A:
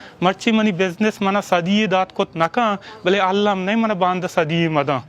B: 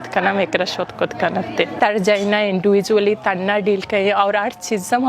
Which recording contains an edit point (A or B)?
B